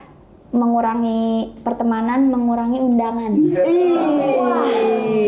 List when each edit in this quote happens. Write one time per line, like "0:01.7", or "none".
none